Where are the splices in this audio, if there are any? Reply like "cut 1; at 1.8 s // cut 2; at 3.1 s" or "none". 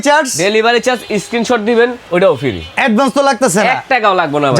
cut 1; at 2.0 s